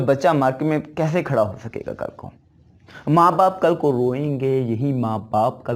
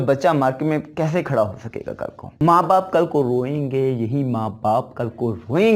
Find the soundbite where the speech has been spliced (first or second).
second